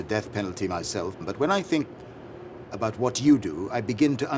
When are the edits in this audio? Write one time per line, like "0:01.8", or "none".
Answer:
0:01.2

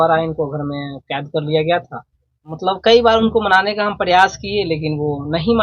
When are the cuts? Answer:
0:02.5

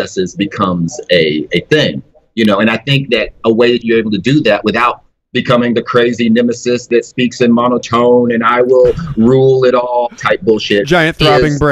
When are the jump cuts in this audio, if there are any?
none

